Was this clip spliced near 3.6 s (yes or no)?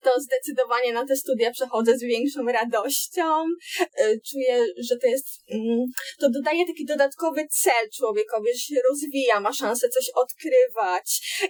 no